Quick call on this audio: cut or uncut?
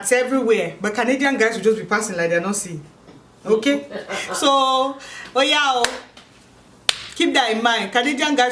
uncut